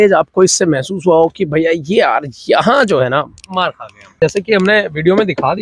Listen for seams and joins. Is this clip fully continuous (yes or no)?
no